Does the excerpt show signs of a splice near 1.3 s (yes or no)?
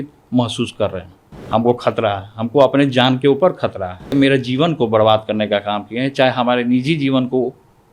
yes